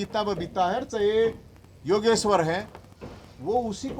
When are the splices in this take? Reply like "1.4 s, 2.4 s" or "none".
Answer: none